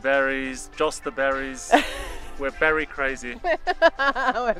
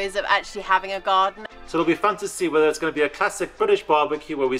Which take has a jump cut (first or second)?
second